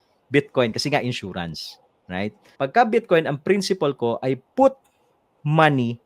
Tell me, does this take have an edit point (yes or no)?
yes